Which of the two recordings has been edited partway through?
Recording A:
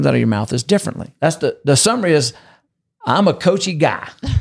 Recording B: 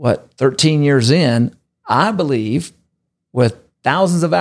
A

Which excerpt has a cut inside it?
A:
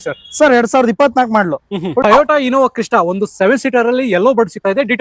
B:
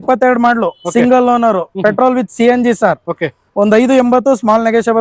A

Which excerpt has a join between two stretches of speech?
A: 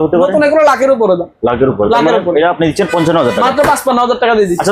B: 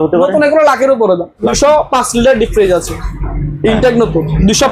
B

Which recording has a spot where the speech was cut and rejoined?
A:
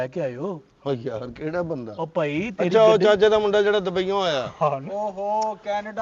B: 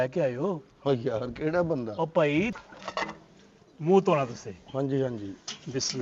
B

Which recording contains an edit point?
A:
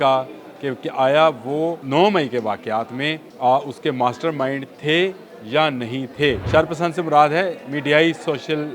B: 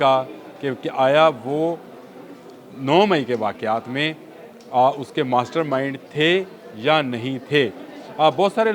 A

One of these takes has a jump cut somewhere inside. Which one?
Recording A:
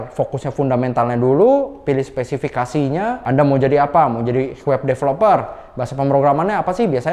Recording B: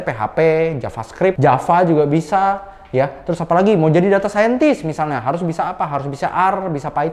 A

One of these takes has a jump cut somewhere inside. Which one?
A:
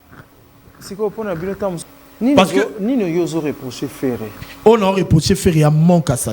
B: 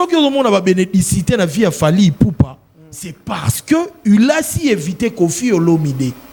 A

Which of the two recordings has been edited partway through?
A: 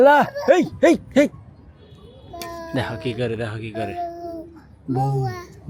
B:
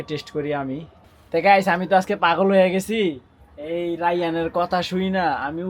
B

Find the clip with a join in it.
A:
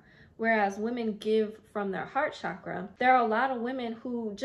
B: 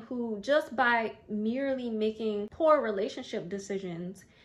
A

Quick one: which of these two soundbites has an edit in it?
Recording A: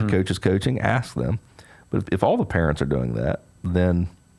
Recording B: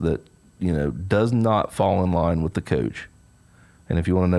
A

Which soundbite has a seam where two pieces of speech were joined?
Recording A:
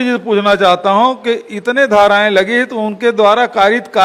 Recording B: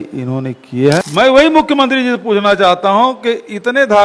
B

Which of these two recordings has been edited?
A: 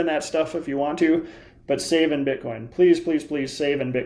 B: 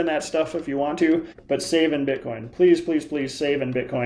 B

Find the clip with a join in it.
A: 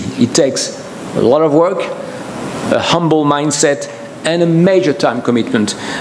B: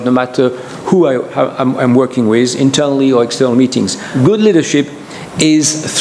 B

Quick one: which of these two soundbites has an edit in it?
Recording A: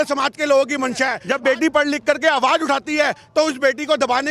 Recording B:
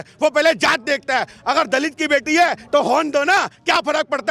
A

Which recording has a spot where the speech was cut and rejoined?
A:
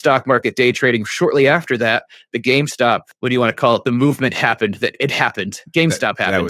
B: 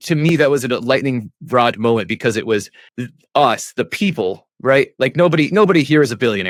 A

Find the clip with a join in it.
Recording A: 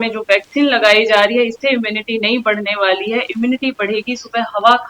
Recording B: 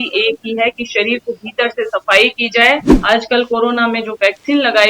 B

